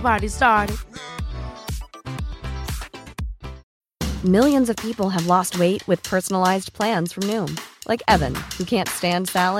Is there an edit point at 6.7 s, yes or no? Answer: no